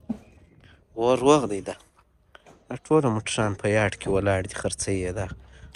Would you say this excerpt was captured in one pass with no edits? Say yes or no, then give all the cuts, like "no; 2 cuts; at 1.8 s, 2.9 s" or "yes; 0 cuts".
yes; 0 cuts